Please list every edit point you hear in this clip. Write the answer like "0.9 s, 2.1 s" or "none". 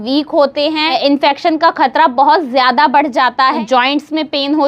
3.6 s